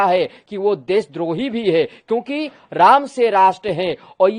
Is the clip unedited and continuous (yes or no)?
yes